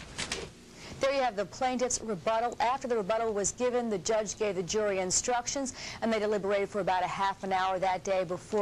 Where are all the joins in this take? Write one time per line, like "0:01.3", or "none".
none